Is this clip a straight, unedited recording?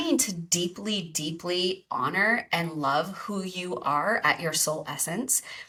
yes; 0 cuts

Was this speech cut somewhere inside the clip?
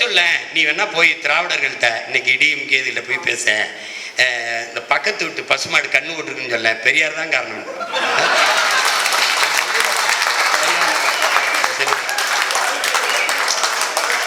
no; 0 cuts

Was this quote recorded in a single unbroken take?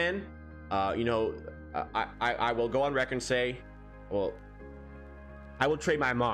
yes; 0 cuts

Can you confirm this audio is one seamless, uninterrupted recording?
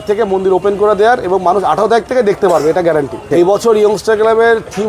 no; 1 cut; at 3.3 s

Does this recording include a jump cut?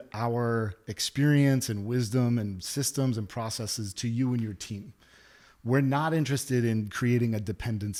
no; 0 cuts

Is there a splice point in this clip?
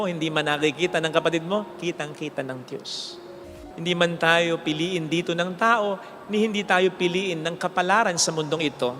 yes; 1 cut; at 3.4 s

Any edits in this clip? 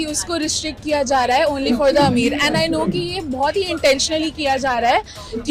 no; 0 cuts

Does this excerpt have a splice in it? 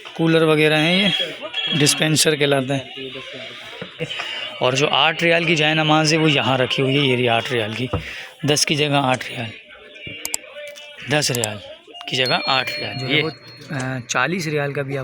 yes; 2 cuts; at 4.1 s, 13.2 s

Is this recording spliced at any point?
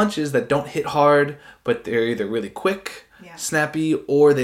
no; 0 cuts

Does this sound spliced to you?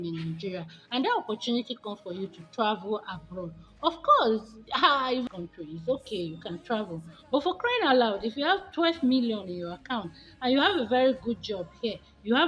yes; 1 cut; at 5.2 s

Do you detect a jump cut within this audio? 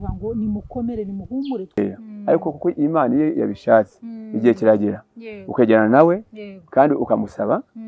yes; 1 cut; at 1.8 s

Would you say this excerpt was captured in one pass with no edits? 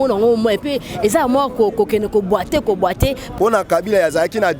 no; 1 cut; at 3.2 s

